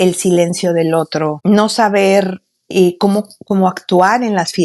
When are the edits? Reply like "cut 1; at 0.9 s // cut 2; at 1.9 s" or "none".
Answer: cut 1; at 1.4 s